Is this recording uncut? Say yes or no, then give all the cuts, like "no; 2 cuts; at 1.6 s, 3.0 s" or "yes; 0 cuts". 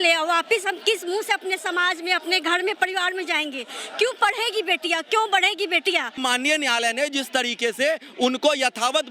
no; 1 cut; at 6.2 s